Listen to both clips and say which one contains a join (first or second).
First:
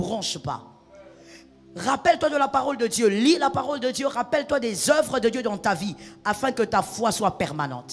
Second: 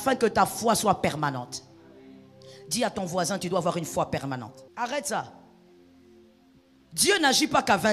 second